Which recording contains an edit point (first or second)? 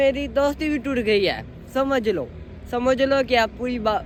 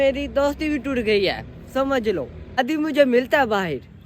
second